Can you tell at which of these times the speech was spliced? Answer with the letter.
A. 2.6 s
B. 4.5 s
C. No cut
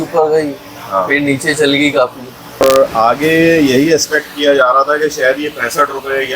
A